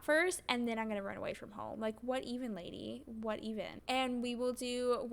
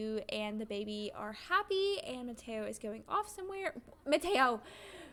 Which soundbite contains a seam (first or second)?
first